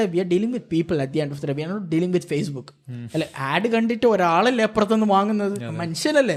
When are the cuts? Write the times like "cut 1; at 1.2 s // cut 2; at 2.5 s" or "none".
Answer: none